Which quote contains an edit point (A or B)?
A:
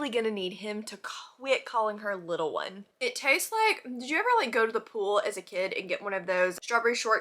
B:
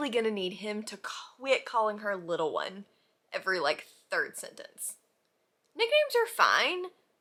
A